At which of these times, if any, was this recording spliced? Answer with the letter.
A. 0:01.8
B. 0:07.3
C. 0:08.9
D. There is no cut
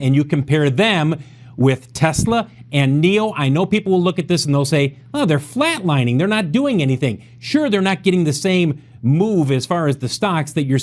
D